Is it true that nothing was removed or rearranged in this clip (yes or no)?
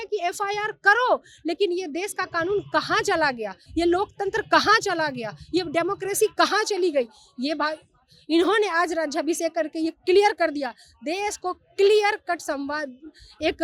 yes